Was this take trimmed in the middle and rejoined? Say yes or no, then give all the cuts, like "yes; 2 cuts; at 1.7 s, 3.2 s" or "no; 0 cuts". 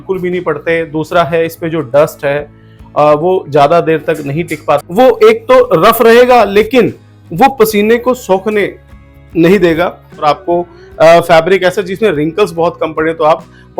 yes; 2 cuts; at 4.9 s, 10.2 s